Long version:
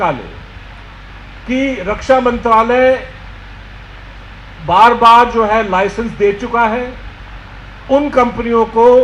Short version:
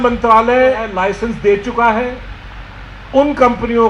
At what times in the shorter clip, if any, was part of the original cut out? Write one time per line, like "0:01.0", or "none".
0:00.9